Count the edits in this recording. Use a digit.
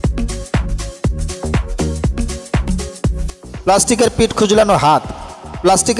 0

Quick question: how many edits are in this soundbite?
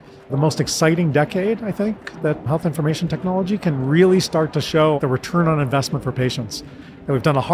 1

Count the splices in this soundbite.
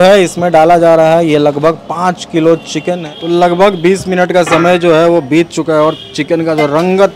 1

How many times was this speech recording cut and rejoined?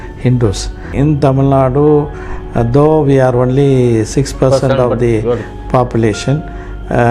1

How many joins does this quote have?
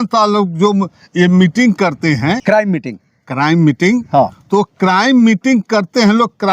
1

